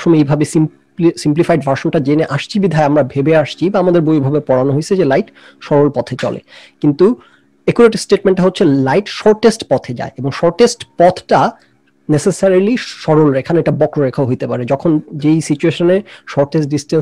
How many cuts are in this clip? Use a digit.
0